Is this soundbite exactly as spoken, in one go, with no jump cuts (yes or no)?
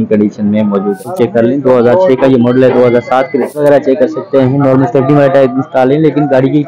no